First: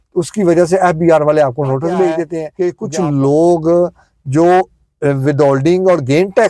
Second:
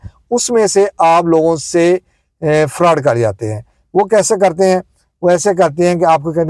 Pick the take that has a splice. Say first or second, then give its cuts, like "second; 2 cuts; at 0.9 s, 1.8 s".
first; 1 cut; at 2.4 s